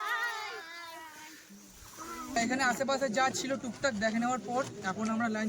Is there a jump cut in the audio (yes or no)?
yes